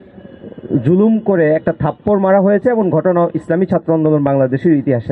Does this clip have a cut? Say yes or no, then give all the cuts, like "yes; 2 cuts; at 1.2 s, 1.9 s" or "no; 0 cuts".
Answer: no; 0 cuts